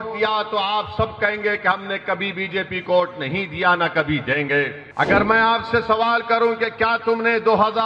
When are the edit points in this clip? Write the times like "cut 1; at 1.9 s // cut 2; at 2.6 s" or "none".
cut 1; at 4.8 s